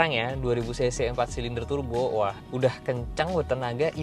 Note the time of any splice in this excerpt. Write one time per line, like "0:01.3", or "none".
0:02.4